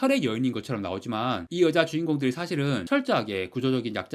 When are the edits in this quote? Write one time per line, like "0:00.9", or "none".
0:01.4